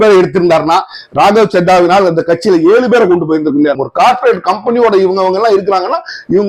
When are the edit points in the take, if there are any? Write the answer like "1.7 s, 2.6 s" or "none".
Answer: 3.8 s